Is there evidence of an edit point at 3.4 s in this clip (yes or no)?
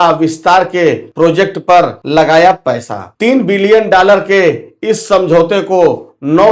no